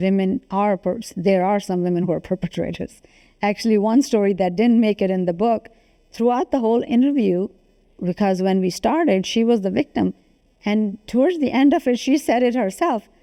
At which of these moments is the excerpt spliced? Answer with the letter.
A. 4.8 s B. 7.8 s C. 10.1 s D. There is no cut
D